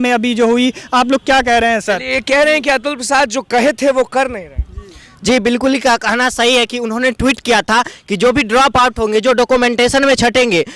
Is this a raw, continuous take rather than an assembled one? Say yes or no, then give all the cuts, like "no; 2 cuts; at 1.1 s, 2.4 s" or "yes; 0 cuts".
yes; 0 cuts